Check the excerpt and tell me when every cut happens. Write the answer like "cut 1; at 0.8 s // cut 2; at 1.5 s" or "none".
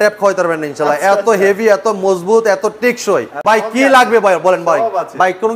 cut 1; at 3.3 s